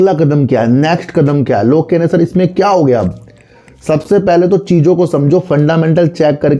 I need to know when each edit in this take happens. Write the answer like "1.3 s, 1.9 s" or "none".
none